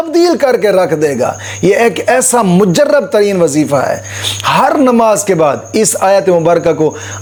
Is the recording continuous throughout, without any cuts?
yes; 0 cuts

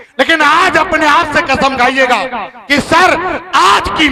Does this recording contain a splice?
no; 0 cuts

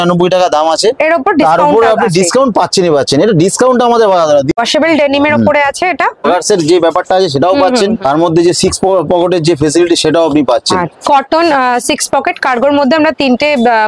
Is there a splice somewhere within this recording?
yes; 3 cuts; at 4.6 s, 6.2 s, 10.9 s

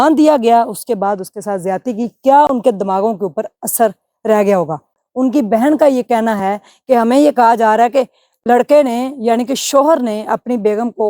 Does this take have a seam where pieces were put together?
yes; 1 cut; at 5.0 s

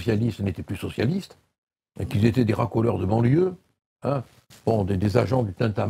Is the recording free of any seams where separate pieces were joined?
yes; 0 cuts

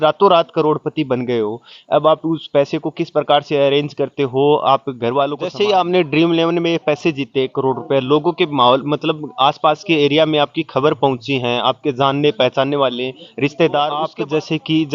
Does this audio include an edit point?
yes; 2 cuts; at 5.4 s, 14.1 s

